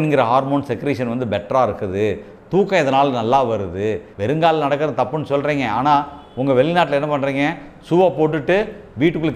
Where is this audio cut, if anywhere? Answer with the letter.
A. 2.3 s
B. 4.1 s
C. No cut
B